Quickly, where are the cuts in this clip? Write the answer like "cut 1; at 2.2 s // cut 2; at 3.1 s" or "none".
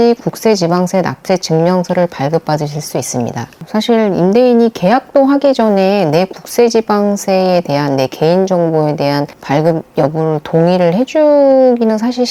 cut 1; at 3.6 s